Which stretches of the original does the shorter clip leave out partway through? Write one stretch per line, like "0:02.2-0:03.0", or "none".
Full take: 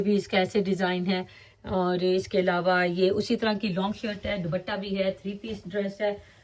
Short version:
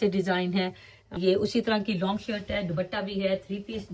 0:01.7-0:02.9